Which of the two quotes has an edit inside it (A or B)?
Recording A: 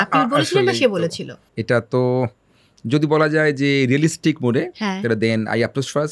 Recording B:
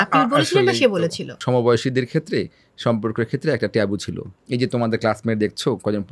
B